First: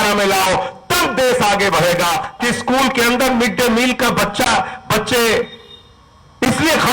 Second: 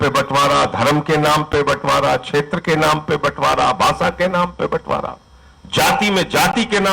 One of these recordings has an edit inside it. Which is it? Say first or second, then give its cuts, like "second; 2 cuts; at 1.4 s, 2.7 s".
first; 1 cut; at 2.3 s